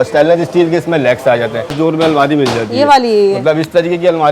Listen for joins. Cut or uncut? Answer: cut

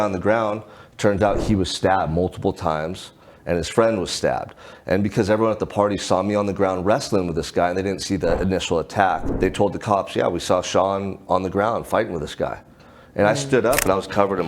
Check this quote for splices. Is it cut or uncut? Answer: cut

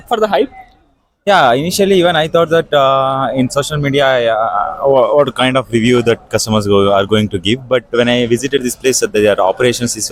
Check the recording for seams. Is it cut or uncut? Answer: uncut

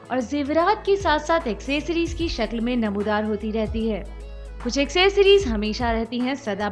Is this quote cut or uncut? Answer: uncut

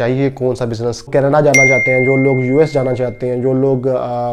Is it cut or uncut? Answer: cut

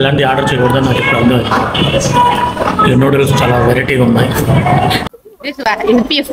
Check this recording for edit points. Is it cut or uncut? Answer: cut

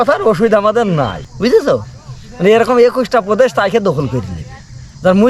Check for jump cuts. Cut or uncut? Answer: cut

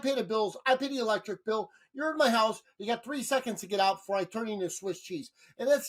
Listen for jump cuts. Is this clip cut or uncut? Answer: uncut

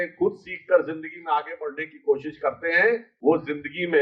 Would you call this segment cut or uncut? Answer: cut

